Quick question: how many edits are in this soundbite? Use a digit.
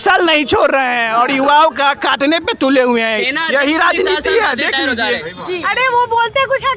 1